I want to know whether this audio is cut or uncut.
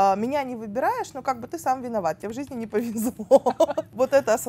uncut